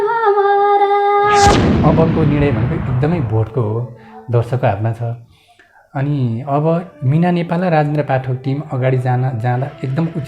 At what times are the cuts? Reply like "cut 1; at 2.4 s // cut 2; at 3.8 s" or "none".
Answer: cut 1; at 1.7 s